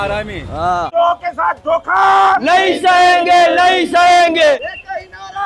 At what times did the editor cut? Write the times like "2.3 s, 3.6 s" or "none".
0.9 s, 4.6 s